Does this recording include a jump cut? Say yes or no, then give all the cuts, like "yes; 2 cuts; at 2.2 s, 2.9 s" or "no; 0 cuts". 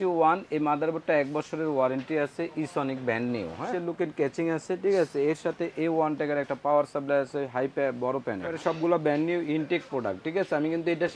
yes; 2 cuts; at 3.7 s, 8.6 s